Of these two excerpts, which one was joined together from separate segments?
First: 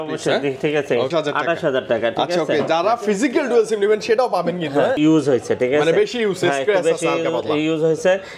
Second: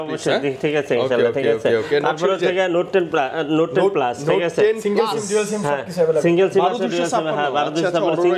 first; 2 cuts; at 1.1 s, 5.0 s

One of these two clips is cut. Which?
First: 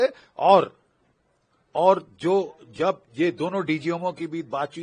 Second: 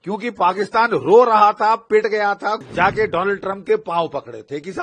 second; 1 cut; at 2.6 s

